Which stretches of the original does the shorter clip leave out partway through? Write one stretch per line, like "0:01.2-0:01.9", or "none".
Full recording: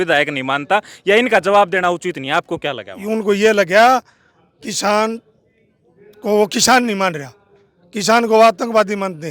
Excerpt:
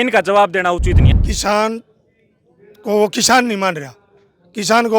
0:02.2-0:04.4

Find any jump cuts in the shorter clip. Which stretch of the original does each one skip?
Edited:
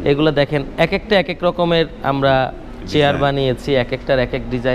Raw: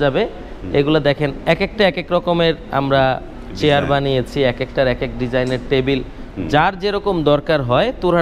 none

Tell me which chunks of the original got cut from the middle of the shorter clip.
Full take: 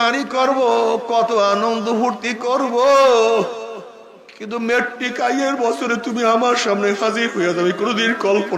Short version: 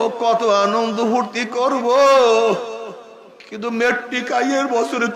none

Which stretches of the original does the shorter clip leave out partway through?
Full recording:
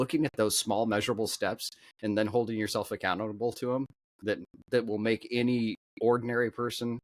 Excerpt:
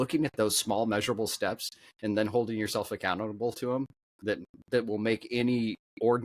none

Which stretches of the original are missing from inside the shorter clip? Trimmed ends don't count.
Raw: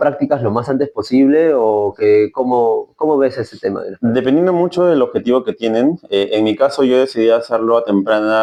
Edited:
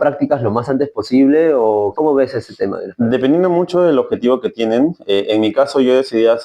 0:01.9-0:03.0

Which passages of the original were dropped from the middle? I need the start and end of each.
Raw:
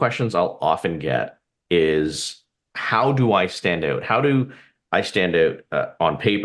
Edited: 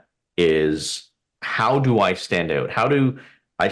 none

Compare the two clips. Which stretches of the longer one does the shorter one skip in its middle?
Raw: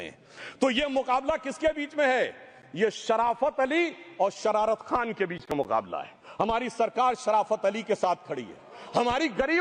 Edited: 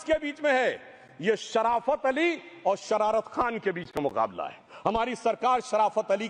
none

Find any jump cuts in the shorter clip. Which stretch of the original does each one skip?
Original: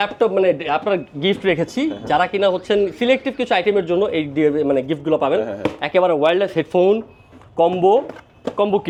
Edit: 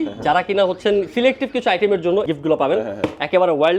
0:04.1-0:04.9

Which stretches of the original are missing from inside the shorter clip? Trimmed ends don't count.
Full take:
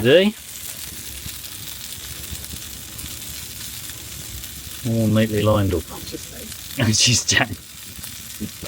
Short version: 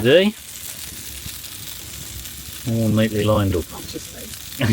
0:01.8-0:04.0

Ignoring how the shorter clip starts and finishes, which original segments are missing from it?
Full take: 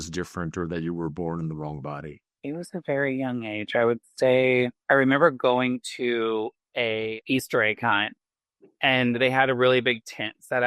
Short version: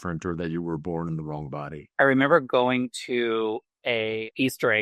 0:02.2-0:04.8

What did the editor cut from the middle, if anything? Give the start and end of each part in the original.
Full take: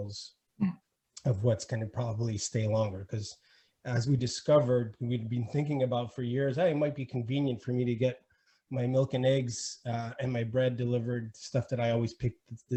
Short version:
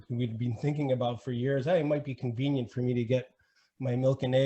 none

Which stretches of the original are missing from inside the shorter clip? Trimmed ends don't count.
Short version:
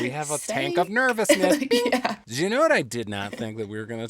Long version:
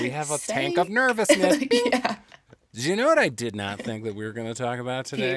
0:02.2-0:02.7

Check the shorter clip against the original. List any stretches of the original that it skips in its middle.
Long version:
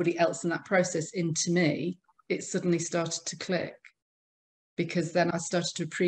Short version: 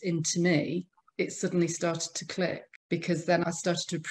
0:03.8-0:04.6

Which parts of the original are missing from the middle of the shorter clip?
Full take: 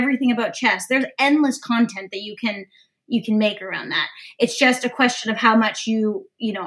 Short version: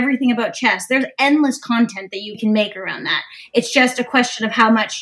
0:02.4-0:03.2

